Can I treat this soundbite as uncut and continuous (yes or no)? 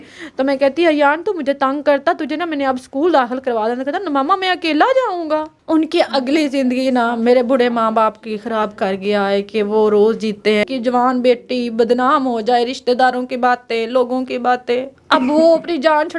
no